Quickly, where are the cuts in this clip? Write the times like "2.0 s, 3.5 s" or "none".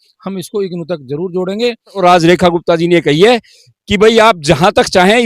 1.9 s